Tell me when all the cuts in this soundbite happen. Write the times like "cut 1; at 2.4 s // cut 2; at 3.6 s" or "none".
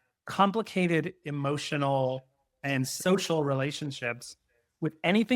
cut 1; at 2.9 s